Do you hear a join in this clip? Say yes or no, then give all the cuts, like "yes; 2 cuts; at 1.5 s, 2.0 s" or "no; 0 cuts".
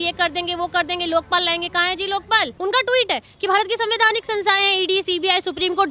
yes; 1 cut; at 2.5 s